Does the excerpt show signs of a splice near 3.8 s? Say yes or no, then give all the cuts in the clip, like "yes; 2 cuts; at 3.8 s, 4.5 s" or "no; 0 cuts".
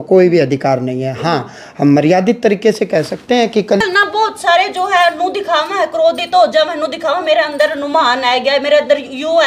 yes; 1 cut; at 3.8 s